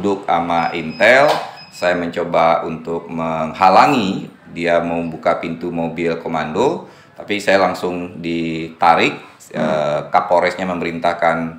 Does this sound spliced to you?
no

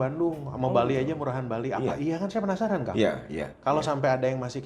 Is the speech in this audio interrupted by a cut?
no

